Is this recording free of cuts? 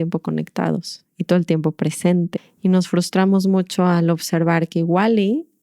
no; 1 cut; at 2.4 s

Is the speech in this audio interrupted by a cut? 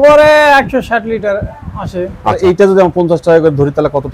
yes; 1 cut; at 2.4 s

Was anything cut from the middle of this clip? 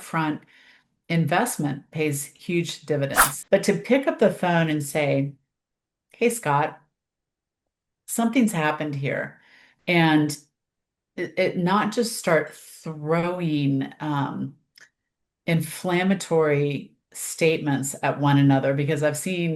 yes; 1 cut; at 3.3 s

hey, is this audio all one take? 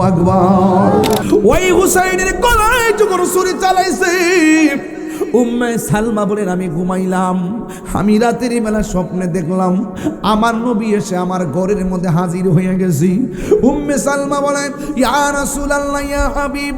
no; 1 cut; at 1.2 s

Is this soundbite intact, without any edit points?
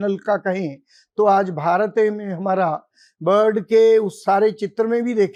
yes; 0 cuts

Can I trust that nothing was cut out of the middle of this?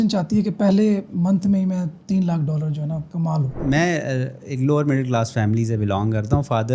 no; 1 cut; at 3.6 s

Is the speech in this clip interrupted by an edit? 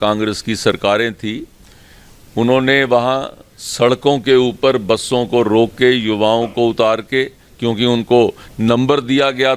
no; 0 cuts

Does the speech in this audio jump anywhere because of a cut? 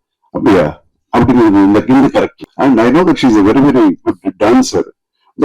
yes; 1 cut; at 2.4 s

